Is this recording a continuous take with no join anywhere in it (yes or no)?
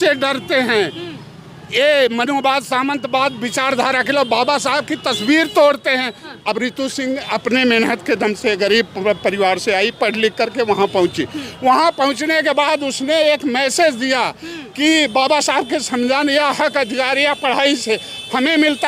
no